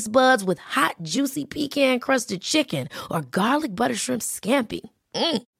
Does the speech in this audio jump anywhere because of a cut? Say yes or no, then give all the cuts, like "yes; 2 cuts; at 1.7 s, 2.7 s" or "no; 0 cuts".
no; 0 cuts